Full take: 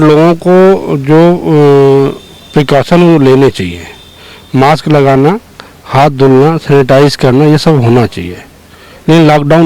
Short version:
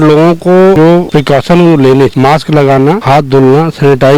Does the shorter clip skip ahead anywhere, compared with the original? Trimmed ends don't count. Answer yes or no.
yes